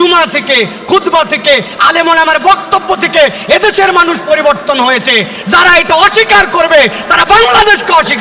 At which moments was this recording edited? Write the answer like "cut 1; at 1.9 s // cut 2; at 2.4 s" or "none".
none